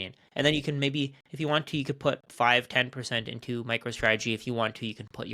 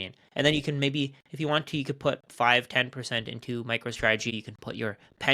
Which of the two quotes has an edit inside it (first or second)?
second